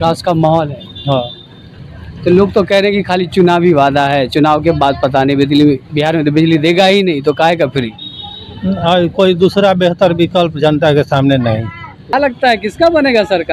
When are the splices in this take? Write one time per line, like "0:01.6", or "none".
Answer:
0:12.1